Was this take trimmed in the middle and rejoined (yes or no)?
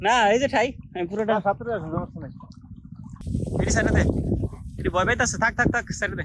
yes